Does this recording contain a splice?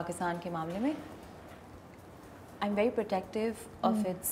no; 0 cuts

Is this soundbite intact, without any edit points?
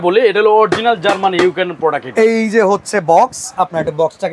yes; 0 cuts

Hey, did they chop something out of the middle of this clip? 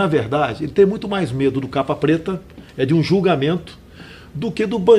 no; 0 cuts

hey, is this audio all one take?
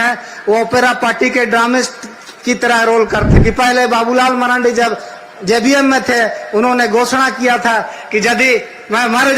no; 1 cut; at 3.3 s

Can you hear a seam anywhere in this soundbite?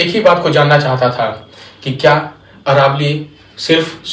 no; 0 cuts

